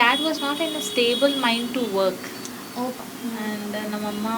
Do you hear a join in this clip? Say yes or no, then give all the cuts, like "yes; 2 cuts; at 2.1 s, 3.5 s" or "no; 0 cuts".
yes; 1 cut; at 3.0 s